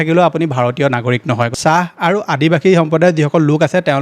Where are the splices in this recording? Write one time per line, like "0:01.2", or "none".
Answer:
0:01.5